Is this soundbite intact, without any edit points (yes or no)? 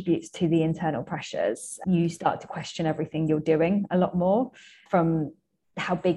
no